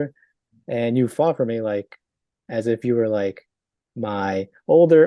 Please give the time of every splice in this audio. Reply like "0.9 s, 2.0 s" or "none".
none